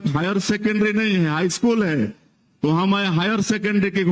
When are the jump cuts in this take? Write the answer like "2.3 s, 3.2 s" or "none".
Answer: none